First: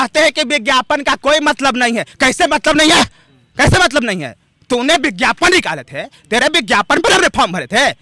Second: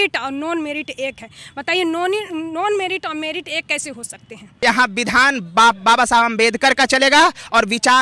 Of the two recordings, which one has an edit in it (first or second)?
second